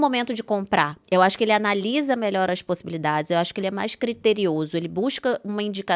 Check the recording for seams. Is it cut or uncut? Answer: cut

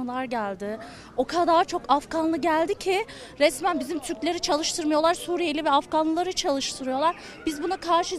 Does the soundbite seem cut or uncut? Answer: uncut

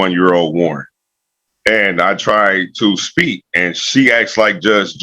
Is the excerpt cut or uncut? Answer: uncut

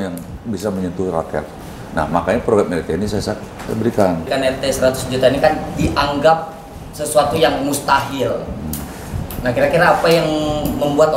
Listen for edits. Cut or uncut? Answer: uncut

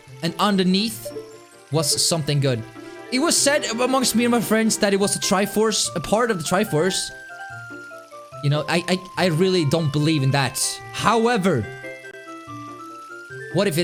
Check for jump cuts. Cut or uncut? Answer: uncut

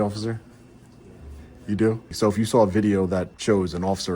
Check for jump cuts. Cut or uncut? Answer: cut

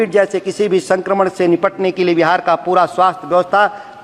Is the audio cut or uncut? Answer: uncut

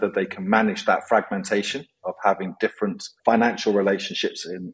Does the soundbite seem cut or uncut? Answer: uncut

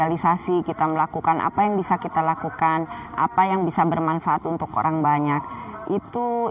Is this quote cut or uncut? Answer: uncut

